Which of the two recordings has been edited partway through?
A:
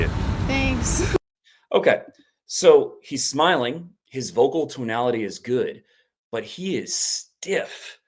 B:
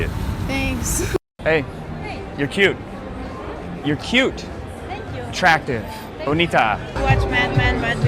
B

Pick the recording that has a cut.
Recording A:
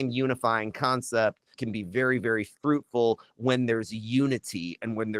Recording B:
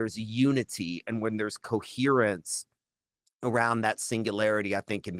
A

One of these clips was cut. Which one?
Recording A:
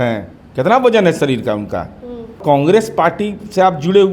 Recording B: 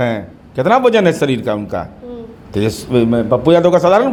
A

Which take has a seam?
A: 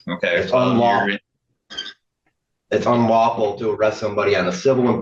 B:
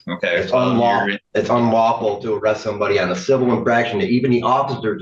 B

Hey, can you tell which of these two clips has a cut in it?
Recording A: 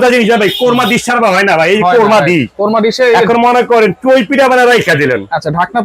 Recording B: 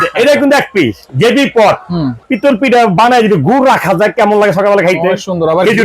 B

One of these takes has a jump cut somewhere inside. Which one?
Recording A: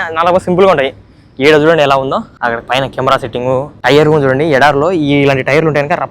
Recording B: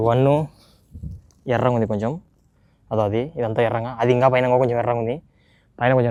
A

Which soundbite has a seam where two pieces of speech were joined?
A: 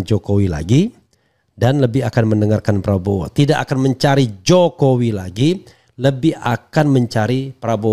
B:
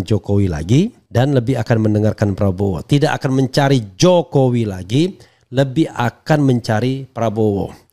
B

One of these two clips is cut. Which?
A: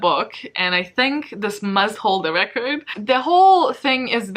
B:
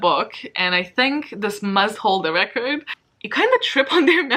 B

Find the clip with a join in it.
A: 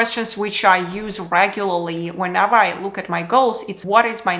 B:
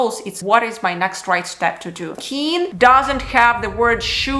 B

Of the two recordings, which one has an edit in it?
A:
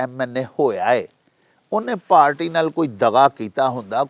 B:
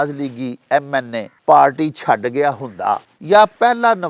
B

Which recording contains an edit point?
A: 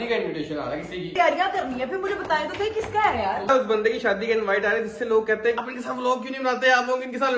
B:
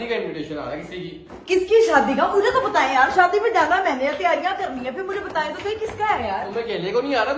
A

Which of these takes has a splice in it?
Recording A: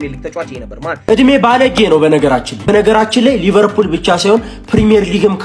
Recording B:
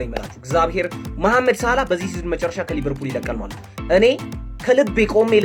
A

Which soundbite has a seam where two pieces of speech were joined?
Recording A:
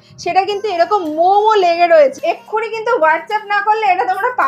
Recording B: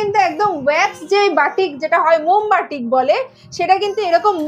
A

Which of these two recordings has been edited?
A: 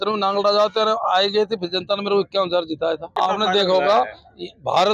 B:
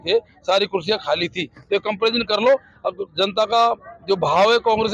A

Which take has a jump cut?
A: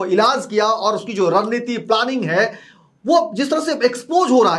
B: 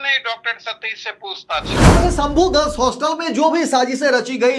B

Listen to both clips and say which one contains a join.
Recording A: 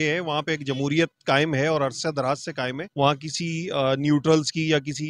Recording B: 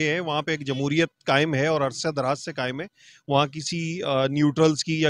A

